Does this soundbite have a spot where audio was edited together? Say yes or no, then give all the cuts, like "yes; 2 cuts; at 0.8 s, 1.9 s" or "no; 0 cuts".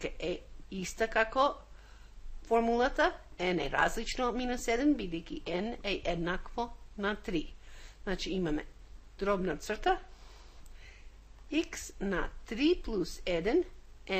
yes; 1 cut; at 8.8 s